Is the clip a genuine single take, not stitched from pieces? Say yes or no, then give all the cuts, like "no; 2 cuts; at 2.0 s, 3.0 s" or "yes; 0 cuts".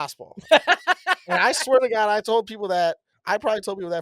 no; 1 cut; at 3.1 s